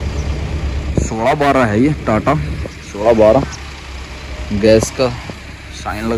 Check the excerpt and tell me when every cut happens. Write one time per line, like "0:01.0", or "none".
none